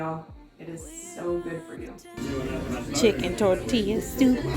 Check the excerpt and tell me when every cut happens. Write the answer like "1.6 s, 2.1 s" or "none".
2.0 s